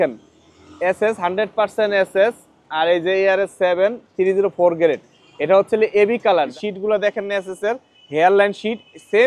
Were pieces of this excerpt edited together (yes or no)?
yes